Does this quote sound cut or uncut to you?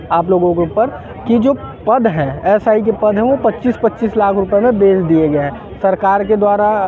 uncut